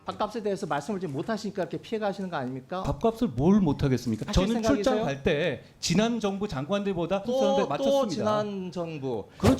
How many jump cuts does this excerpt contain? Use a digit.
3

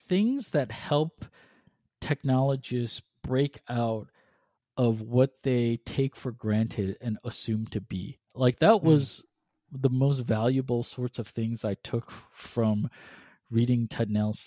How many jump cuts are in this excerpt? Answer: 0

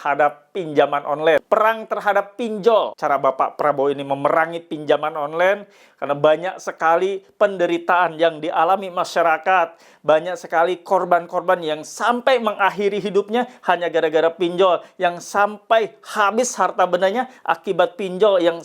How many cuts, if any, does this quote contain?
2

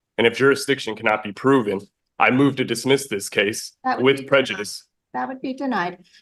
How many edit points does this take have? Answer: 0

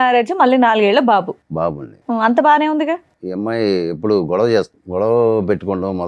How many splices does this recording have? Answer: 2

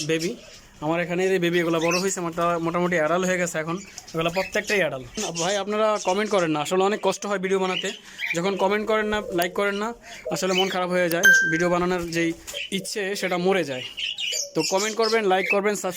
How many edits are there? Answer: 2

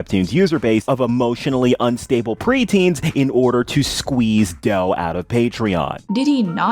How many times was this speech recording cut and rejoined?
0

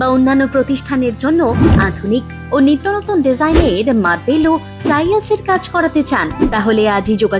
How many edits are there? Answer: 0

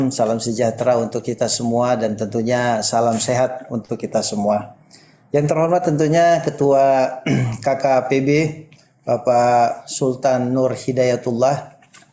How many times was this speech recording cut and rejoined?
0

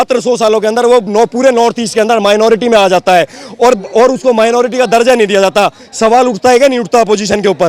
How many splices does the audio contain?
0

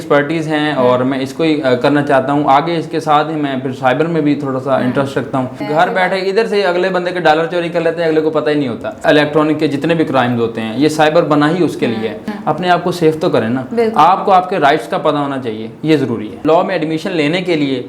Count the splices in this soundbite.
4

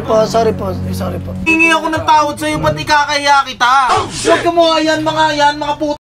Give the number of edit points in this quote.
1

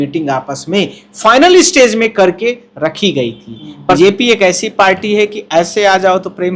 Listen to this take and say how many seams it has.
1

